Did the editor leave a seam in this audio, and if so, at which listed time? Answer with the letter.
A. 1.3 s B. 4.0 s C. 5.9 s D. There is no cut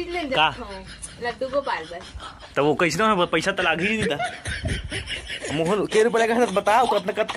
D